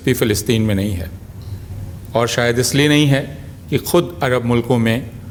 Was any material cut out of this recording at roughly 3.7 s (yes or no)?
no